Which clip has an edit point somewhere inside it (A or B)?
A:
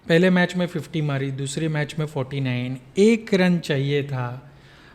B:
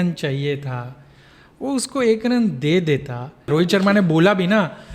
B